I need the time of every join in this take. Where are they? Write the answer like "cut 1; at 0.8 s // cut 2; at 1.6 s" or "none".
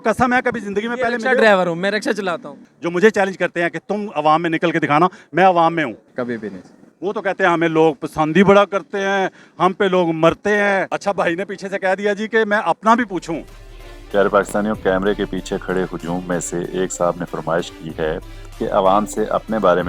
cut 1; at 2.6 s // cut 2; at 6.1 s // cut 3; at 10.9 s